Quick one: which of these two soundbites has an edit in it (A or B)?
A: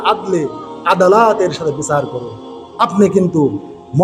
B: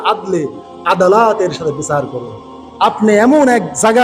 B